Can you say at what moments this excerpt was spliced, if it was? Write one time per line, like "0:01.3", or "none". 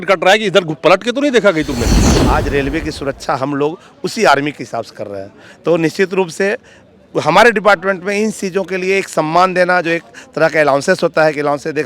0:02.1